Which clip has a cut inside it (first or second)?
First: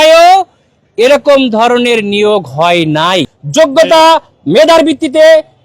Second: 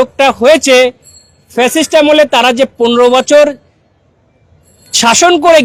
first